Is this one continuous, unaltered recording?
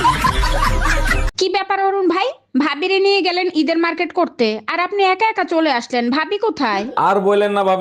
no; 1 cut; at 1.3 s

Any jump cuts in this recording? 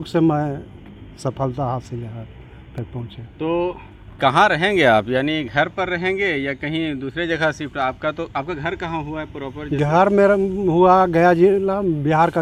no; 0 cuts

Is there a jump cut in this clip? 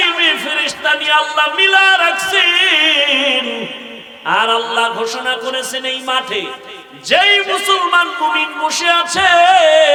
no; 0 cuts

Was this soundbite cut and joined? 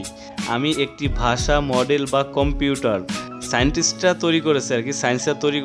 no; 0 cuts

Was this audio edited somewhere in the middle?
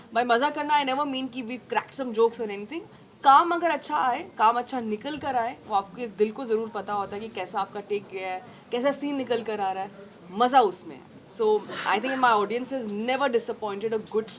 no; 0 cuts

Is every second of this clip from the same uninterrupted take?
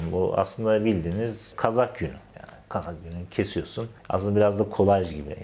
yes; 0 cuts

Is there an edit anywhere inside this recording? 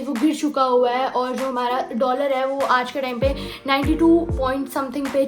no; 0 cuts

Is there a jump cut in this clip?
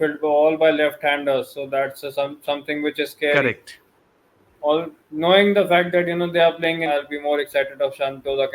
yes; 1 cut; at 6.9 s

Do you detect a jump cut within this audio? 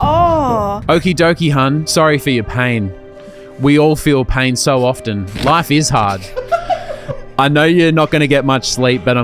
yes; 2 cuts; at 0.8 s, 1.8 s

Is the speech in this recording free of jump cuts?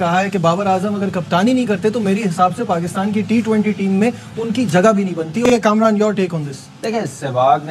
no; 1 cut; at 5.4 s

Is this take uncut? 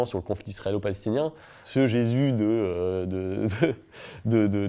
no; 1 cut; at 1.6 s

